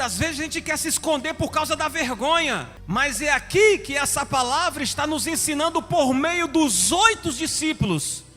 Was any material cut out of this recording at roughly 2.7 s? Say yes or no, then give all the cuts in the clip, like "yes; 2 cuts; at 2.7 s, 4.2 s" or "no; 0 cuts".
yes; 1 cut; at 2.7 s